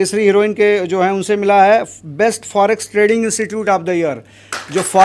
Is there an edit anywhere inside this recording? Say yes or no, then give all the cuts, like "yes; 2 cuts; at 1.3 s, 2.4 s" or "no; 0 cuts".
no; 0 cuts